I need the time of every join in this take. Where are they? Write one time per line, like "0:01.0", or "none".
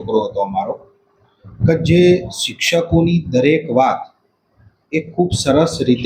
none